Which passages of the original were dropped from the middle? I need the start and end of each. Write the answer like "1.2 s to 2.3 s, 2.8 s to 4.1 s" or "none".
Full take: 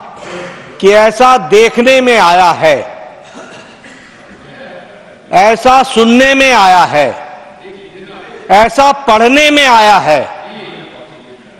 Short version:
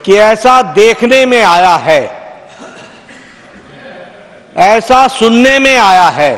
none